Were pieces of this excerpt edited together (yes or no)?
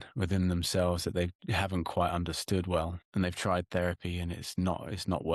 yes